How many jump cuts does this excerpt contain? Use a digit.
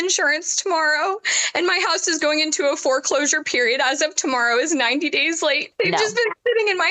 1